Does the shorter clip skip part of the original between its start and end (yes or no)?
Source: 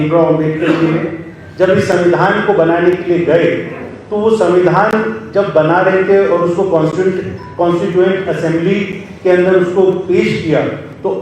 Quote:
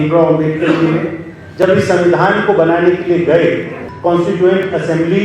yes